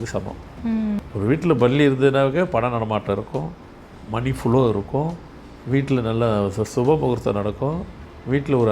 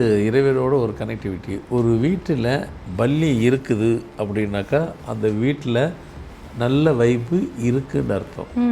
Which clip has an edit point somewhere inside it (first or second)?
first